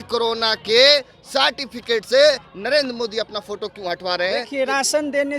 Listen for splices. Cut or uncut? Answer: cut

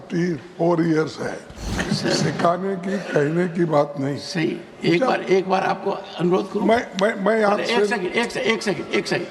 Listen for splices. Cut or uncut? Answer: cut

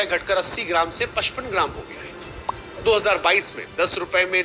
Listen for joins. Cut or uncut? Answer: uncut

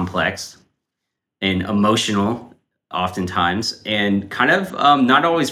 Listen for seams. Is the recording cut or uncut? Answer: uncut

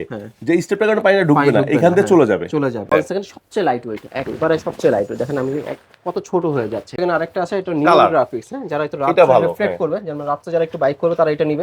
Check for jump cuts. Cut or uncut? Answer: cut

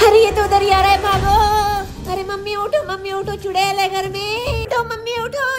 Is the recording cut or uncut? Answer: cut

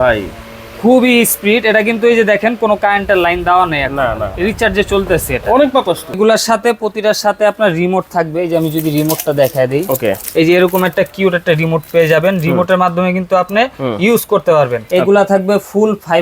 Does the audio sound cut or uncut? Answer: cut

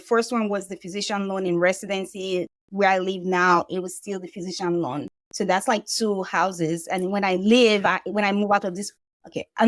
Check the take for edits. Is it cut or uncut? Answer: uncut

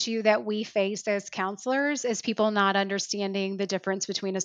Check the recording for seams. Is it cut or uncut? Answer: uncut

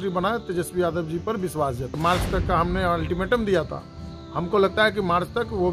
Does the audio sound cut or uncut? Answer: cut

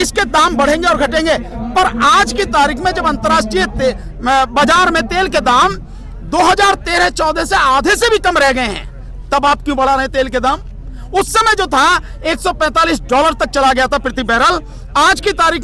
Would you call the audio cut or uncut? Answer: uncut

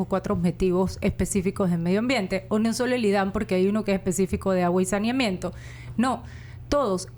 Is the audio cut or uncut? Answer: uncut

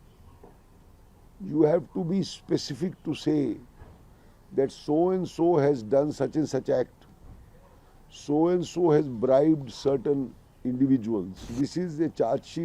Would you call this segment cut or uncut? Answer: cut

